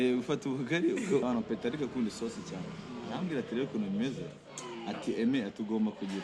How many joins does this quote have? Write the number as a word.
one